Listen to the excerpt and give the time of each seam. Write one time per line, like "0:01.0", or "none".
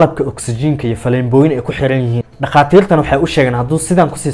0:02.2